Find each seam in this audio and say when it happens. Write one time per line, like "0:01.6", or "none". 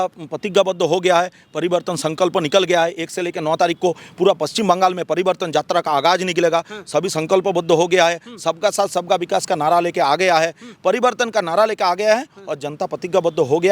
none

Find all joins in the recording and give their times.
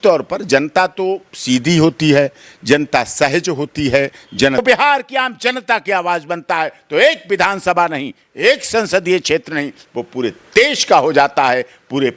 0:04.6

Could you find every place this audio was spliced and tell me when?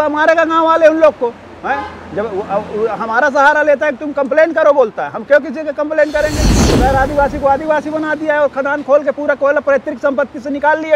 0:06.6

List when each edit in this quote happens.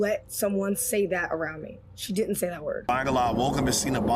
0:02.8

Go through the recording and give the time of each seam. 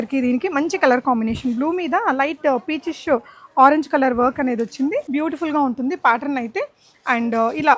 0:05.1

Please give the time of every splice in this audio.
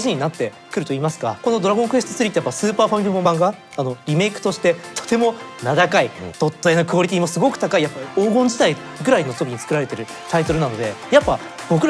0:01.4
0:03.2
0:06.2
0:07.9

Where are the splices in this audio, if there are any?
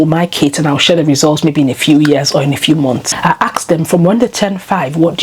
0:03.1

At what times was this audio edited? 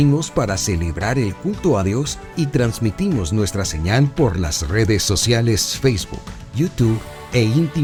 none

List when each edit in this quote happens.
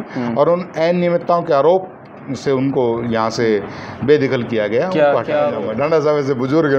0:05.9

